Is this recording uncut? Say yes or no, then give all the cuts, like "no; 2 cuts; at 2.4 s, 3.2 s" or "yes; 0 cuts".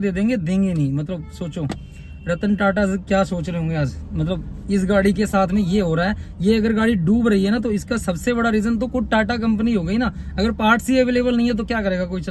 yes; 0 cuts